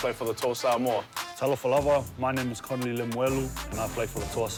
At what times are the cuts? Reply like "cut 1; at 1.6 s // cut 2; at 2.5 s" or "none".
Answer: none